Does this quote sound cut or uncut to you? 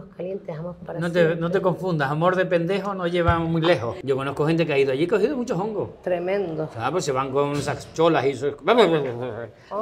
cut